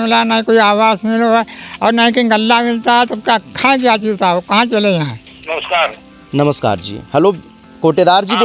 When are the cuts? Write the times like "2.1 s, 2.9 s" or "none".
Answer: 5.5 s